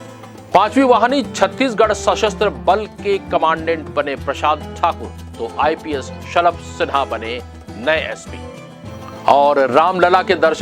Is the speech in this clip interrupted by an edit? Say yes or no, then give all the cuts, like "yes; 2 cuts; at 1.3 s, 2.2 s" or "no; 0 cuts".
no; 0 cuts